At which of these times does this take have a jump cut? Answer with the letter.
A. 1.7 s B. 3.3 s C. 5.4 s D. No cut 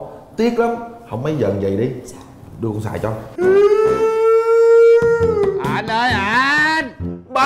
B